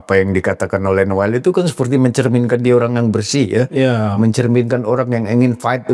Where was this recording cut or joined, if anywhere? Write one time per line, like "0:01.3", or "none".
none

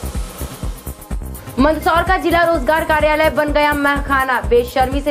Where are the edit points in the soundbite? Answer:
0:01.3

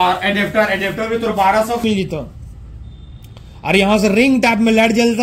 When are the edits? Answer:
0:01.8

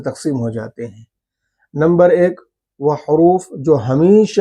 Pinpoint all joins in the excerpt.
none

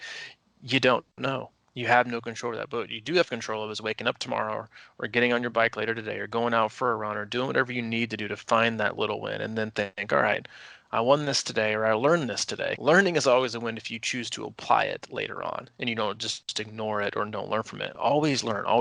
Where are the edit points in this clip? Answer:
0:12.7

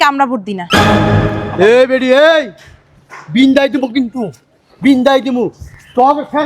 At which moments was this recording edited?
none

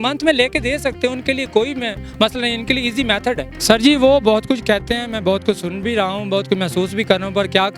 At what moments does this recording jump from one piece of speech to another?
0:03.5

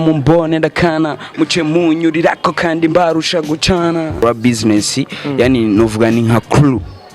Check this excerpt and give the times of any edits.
0:04.2

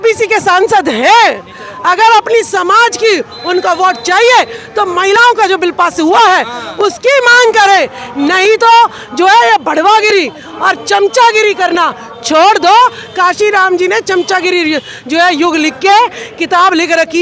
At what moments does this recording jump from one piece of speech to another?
none

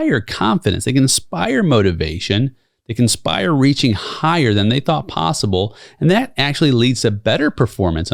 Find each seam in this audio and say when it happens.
none

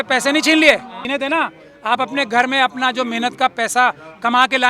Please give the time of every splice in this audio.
0:00.9

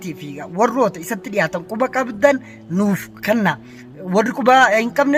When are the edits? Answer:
none

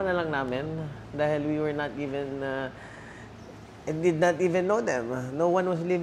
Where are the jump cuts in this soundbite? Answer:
none

